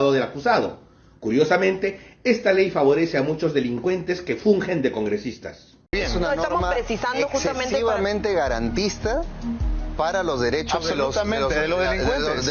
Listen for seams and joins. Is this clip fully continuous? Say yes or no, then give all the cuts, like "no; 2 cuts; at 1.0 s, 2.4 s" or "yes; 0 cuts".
no; 1 cut; at 5.9 s